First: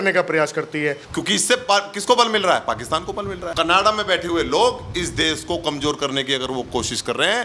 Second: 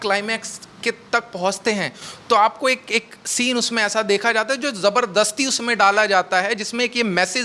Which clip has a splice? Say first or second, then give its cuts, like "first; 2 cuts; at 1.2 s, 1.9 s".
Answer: first; 2 cuts; at 1.1 s, 3.4 s